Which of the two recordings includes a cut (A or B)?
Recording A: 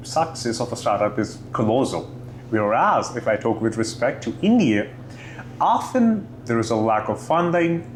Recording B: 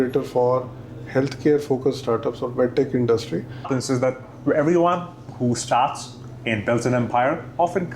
B